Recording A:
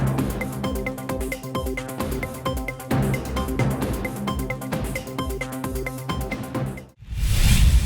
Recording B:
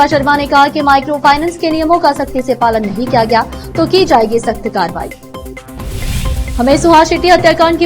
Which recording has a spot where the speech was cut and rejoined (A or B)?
A